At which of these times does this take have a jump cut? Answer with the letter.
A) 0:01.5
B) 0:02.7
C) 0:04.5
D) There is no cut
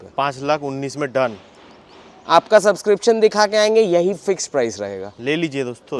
D